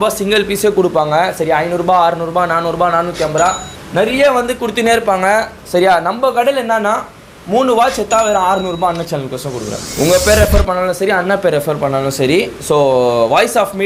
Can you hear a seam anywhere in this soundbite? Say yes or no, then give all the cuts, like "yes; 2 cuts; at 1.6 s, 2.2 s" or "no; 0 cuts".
no; 0 cuts